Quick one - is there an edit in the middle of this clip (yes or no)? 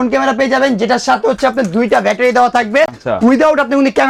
no